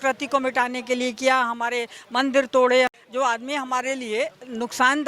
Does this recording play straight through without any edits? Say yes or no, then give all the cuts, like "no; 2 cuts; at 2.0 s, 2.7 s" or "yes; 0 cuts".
no; 1 cut; at 2.9 s